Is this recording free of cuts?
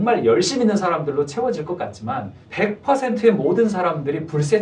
no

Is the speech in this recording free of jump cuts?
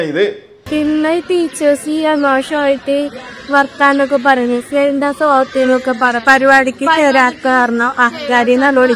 yes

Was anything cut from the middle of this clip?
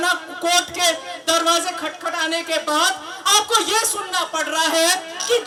no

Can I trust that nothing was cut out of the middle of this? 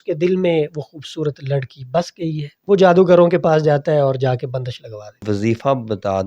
no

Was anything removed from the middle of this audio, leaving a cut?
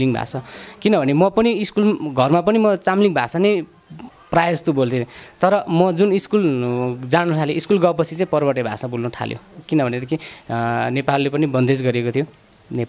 no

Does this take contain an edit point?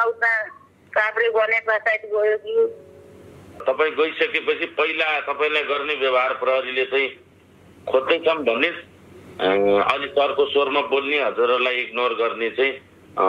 no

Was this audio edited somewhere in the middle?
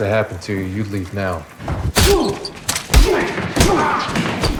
no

